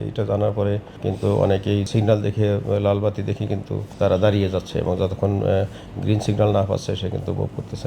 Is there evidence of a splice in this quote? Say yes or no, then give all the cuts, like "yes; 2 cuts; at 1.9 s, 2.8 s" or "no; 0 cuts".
yes; 3 cuts; at 0.9 s, 1.9 s, 3.8 s